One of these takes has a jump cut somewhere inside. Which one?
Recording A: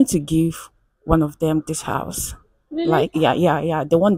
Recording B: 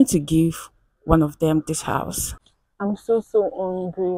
B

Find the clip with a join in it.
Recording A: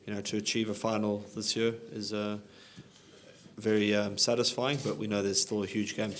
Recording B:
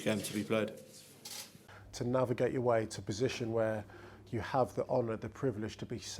B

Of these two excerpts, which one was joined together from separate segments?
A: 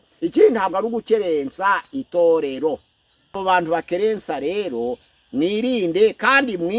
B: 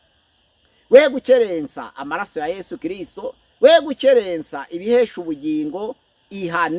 A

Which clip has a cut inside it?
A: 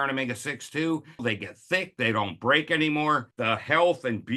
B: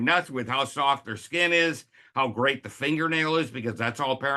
A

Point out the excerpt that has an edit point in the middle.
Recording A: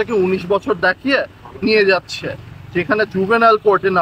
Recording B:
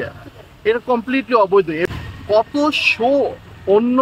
B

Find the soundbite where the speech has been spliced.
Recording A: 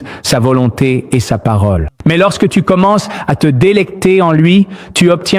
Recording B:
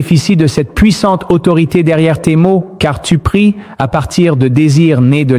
A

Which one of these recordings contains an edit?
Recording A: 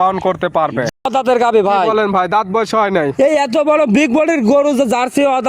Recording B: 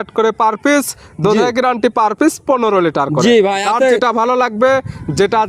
A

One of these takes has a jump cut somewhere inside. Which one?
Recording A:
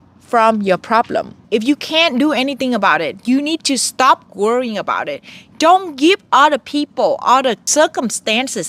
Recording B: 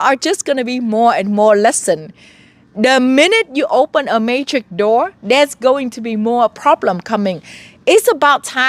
A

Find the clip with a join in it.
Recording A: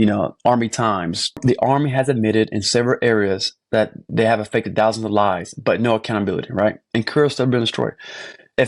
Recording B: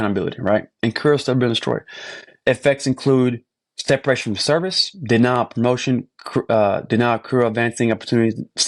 A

